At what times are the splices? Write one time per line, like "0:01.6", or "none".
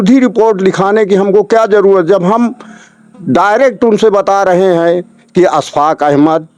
none

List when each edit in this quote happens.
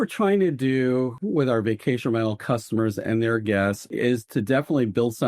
0:01.1
0:03.9

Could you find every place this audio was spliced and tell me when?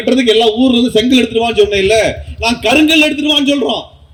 none

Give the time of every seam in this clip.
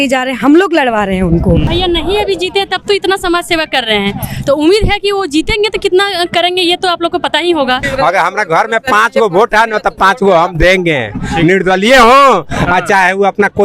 0:01.7
0:07.9

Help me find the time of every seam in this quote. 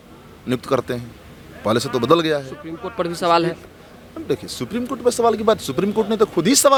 none

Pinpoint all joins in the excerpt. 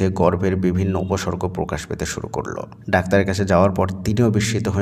0:02.7

